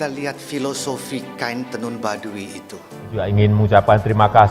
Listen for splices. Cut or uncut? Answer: cut